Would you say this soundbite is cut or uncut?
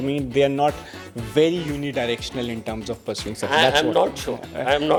uncut